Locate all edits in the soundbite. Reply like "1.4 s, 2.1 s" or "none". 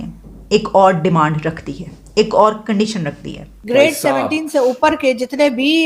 3.4 s